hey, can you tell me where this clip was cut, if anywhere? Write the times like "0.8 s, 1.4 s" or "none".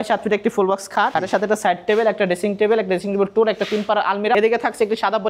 1.1 s, 4.3 s